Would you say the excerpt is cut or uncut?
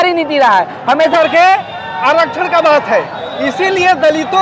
cut